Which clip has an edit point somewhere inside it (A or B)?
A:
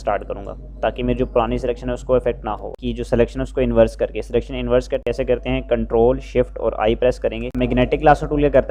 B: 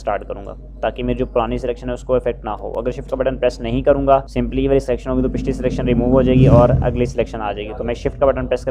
A